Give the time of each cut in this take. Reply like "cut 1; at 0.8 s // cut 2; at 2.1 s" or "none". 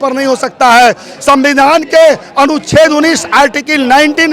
none